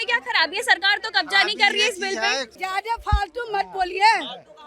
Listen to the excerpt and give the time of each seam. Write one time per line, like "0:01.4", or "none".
0:02.5